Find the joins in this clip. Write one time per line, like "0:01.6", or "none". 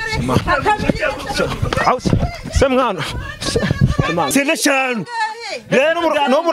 0:04.3